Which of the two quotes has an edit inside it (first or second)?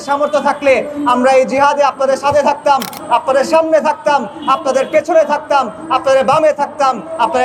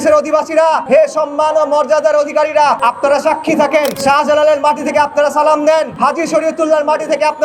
second